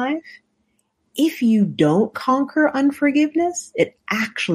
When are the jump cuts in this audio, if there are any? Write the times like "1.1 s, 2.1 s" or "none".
none